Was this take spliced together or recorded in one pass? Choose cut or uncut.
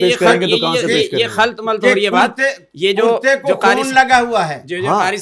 uncut